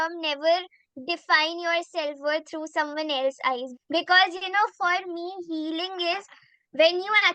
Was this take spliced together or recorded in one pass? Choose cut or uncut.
cut